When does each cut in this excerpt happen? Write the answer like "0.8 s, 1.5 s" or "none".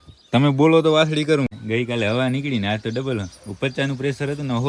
1.5 s